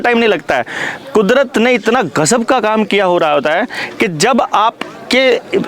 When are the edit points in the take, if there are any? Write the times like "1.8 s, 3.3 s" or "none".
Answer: none